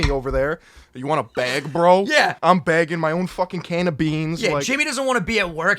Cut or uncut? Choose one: cut